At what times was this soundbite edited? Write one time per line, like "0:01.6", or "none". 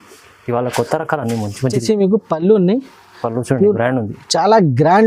0:01.8